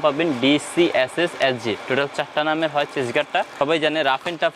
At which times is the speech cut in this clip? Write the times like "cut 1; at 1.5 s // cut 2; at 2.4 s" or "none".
cut 1; at 3.5 s